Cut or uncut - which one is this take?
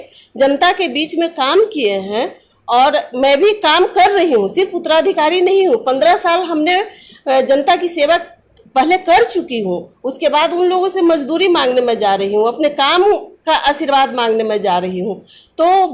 uncut